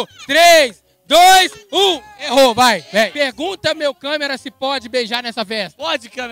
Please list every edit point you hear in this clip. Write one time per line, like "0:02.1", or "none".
0:03.1